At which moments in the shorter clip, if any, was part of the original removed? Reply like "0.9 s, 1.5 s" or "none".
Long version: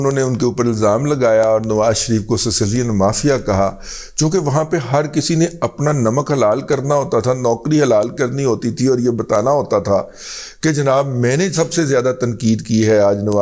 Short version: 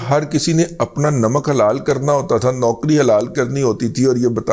none